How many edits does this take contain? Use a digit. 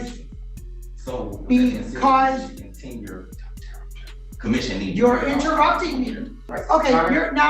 1